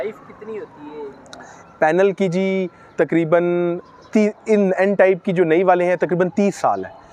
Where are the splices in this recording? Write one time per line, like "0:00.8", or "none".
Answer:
none